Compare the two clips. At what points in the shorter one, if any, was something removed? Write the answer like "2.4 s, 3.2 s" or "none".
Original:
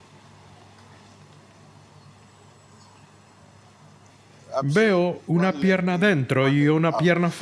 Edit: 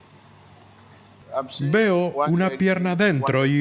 1.6 s